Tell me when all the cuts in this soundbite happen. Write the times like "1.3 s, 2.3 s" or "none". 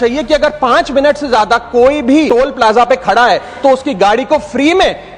2.3 s